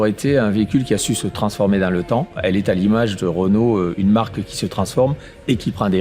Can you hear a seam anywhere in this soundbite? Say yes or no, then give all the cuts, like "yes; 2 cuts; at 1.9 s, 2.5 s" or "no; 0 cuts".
yes; 1 cut; at 2.4 s